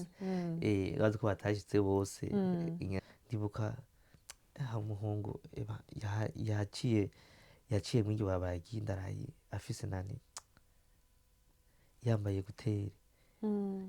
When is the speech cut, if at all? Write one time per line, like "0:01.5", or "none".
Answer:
0:03.0